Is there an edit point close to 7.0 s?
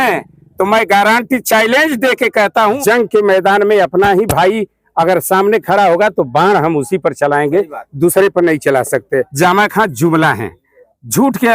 no; 2 cuts; at 2.8 s, 9.3 s

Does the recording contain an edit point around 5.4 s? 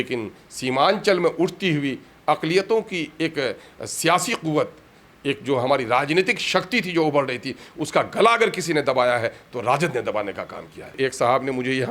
no; 1 cut; at 10.9 s

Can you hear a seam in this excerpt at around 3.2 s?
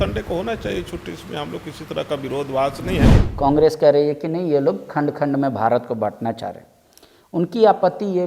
yes; 1 cut; at 3.2 s

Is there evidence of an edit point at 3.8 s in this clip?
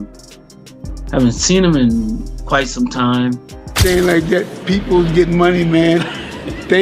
yes; 1 cut; at 3.8 s

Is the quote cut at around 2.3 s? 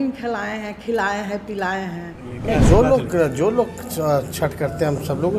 yes; 1 cut; at 2.3 s

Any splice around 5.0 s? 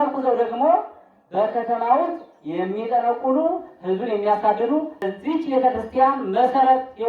yes; 1 cut; at 5.0 s

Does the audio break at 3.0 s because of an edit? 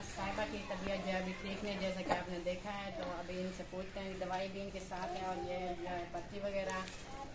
no; 0 cuts

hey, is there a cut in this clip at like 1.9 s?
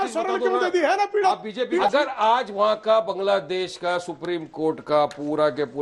yes; 1 cut; at 1.9 s

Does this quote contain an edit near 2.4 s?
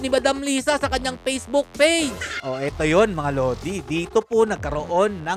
yes; 1 cut; at 2.4 s

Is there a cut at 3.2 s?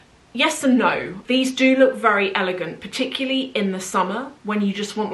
no; 1 cut; at 1.2 s

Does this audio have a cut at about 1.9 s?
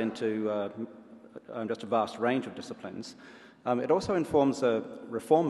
no; 1 cut; at 4.0 s

